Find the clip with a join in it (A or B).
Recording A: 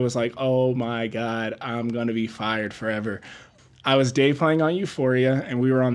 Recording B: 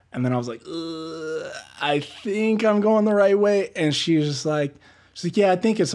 A